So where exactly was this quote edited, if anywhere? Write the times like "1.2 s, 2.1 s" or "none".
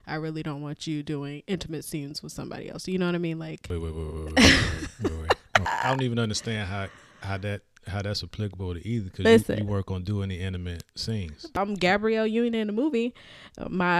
3.6 s, 5.7 s, 11.4 s